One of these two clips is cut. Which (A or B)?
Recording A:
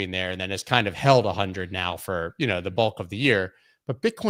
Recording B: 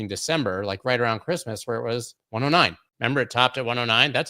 B